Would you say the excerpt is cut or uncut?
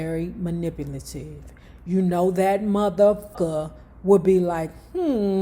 cut